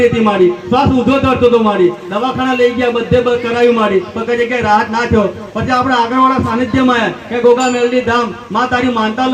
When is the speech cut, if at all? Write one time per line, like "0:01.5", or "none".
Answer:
none